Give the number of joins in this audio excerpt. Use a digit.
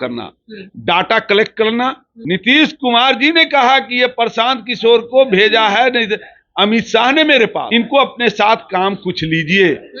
2